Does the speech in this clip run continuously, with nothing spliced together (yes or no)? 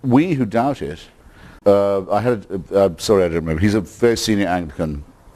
yes